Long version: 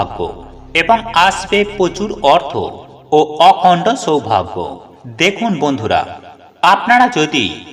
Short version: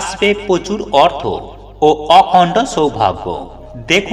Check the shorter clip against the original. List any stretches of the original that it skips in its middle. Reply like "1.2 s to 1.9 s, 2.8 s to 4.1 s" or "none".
none